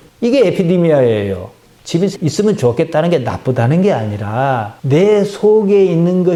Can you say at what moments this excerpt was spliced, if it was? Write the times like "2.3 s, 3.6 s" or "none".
none